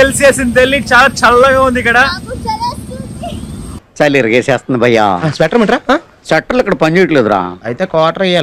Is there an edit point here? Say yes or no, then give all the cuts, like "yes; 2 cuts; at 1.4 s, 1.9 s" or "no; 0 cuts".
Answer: no; 0 cuts